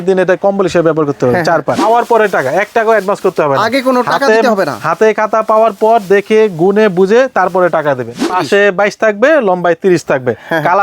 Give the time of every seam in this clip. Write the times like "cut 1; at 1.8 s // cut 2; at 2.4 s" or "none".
cut 1; at 1.8 s // cut 2; at 8.3 s